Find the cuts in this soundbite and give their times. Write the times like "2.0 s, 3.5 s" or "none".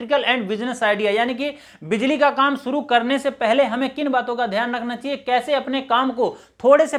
none